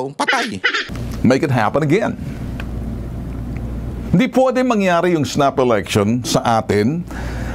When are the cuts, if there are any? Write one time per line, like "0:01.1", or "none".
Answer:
0:01.0